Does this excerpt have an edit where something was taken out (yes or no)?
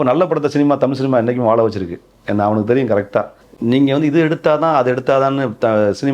yes